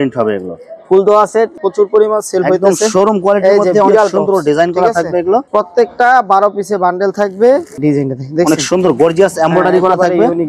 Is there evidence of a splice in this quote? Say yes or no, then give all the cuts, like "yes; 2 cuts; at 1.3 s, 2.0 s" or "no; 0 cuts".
yes; 3 cuts; at 1.6 s, 5.5 s, 7.7 s